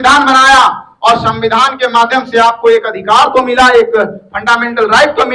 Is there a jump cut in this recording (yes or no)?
no